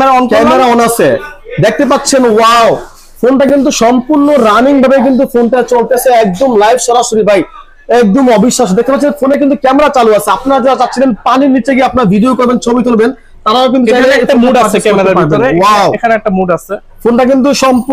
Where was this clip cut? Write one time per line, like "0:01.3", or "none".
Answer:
none